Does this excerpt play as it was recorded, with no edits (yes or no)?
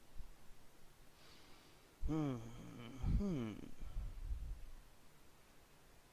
no